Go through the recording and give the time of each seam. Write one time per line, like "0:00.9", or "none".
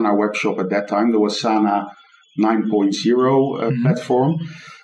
none